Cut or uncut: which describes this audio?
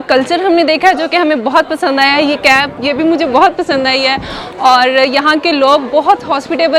uncut